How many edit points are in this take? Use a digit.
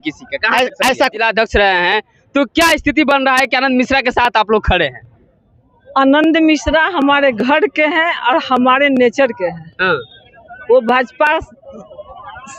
1